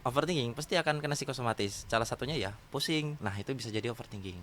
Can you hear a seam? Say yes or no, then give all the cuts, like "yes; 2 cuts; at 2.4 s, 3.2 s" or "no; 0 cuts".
yes; 1 cut; at 3.2 s